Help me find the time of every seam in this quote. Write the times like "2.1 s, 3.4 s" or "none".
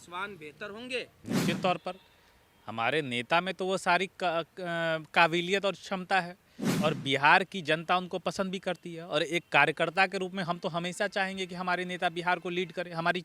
1.2 s